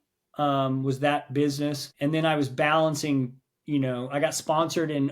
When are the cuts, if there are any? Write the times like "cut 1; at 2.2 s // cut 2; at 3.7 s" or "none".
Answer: cut 1; at 1.9 s